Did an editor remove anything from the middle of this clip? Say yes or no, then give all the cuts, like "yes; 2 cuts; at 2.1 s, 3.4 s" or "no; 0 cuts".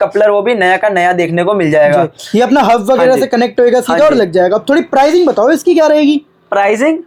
no; 0 cuts